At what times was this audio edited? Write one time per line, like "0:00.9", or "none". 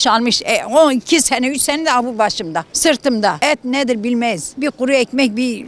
0:02.7
0:03.4
0:04.5

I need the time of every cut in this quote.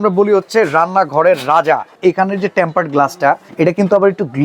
0:02.0
0:03.5

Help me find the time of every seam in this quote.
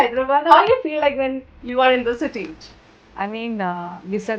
0:02.6

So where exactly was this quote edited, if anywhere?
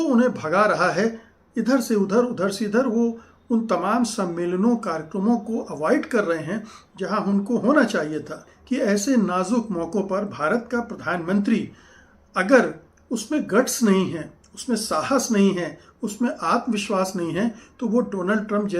0:08.5

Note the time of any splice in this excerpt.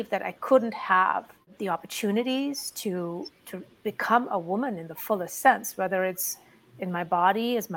0:01.5

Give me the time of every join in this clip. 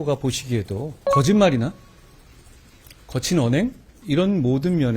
0:01.0
0:03.9

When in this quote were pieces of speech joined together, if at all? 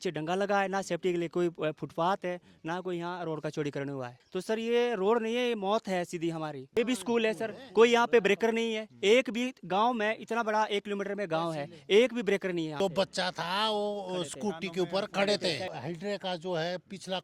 0:04.2
0:06.8
0:12.7
0:15.7

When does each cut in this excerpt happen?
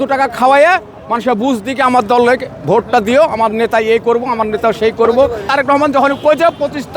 0:05.5

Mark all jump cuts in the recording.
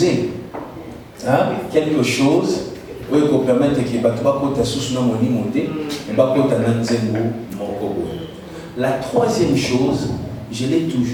none

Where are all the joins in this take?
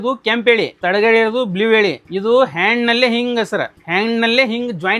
none

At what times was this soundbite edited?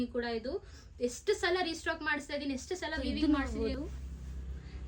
0:02.9

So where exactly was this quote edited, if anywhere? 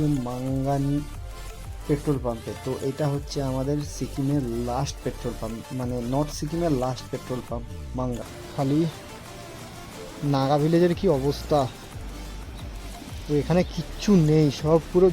0:08.2

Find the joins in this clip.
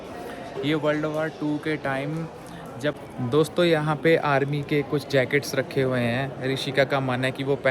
0:03.0

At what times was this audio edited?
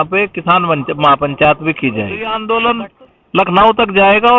0:02.3

